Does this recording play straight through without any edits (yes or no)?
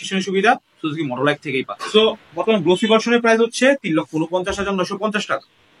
no